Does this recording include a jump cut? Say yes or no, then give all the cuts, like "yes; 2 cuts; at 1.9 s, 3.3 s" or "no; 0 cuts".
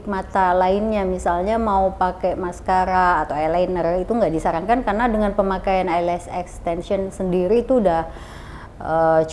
no; 0 cuts